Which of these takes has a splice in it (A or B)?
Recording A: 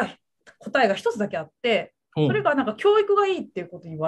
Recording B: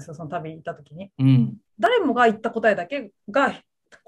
B